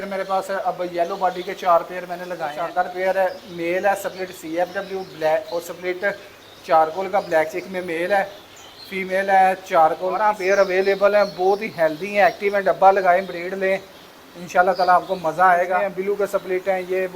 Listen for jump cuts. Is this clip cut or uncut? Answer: cut